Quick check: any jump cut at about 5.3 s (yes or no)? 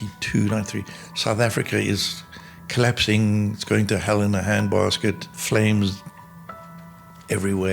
yes